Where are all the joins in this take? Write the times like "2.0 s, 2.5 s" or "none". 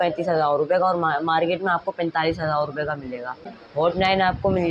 3.6 s